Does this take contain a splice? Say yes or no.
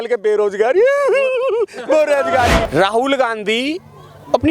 yes